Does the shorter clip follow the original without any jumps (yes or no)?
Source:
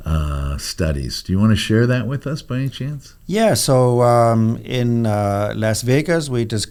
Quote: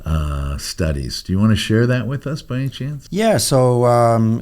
no